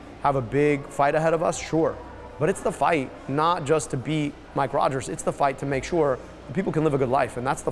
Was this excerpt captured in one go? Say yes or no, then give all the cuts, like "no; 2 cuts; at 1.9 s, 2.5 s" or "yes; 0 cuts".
yes; 0 cuts